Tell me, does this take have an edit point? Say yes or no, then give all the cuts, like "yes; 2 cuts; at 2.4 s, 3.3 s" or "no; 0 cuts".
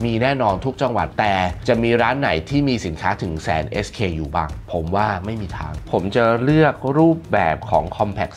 yes; 2 cuts; at 4.6 s, 5.9 s